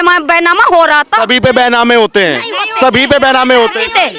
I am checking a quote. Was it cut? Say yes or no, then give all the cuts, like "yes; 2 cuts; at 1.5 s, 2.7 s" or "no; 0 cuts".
no; 0 cuts